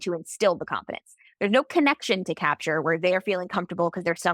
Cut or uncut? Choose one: uncut